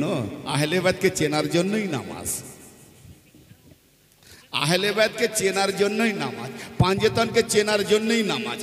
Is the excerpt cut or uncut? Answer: uncut